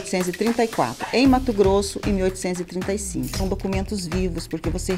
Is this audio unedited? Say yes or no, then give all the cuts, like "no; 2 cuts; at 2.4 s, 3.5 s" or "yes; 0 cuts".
no; 1 cut; at 3.3 s